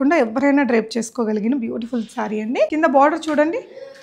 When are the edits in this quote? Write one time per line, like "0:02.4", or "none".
0:02.7